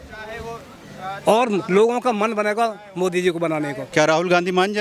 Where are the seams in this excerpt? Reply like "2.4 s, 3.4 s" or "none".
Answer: 3.8 s